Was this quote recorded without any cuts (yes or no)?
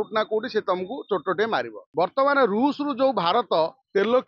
no